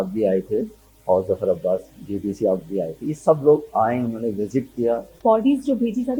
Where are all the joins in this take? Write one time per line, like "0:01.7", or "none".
0:05.1